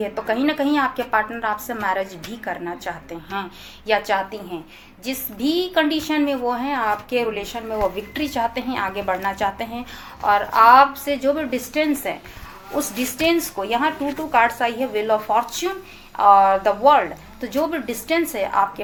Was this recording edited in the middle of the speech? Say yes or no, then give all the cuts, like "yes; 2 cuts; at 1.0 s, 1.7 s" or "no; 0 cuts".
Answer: no; 0 cuts